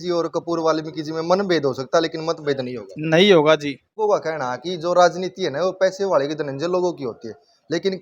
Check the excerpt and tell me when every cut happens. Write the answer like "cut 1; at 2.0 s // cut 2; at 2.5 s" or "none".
cut 1; at 3.9 s